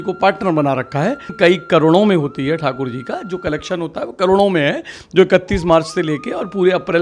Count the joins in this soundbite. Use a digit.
1